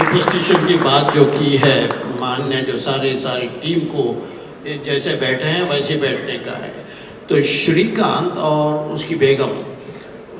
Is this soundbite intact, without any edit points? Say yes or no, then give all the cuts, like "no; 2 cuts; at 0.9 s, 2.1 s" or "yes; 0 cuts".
yes; 0 cuts